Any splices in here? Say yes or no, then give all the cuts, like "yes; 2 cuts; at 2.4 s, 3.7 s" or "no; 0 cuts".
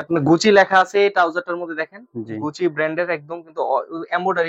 no; 0 cuts